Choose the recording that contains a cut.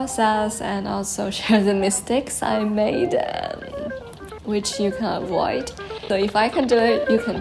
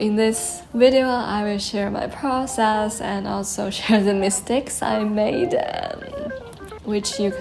first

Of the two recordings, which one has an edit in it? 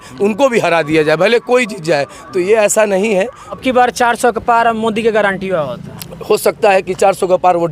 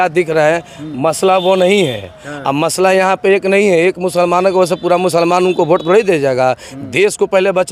first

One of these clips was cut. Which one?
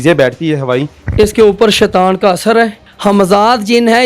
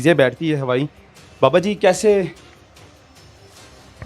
first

